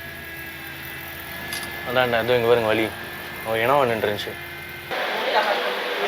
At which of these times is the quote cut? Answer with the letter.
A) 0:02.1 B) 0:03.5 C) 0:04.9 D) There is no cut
C